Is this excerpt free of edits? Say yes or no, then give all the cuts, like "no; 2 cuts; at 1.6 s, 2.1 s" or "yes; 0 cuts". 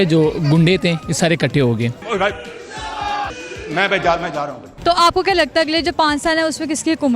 no; 2 cuts; at 2.0 s, 3.3 s